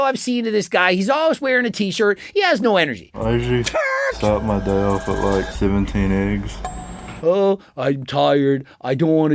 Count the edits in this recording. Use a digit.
2